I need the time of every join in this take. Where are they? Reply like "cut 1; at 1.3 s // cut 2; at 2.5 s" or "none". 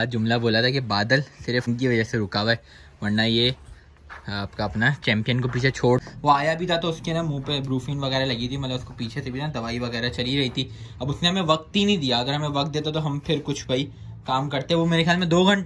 cut 1; at 1.7 s // cut 2; at 6.0 s